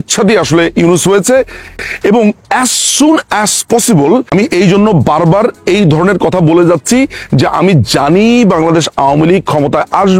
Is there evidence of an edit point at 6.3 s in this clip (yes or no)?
no